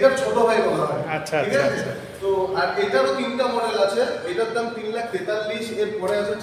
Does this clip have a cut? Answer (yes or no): no